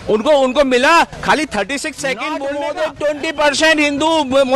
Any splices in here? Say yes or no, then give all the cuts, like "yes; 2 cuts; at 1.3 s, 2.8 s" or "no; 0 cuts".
yes; 1 cut; at 2.4 s